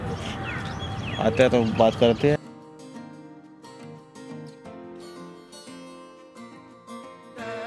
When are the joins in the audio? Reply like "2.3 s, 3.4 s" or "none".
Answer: 2.4 s